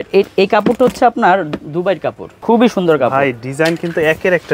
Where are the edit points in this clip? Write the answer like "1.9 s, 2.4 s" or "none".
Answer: 2.3 s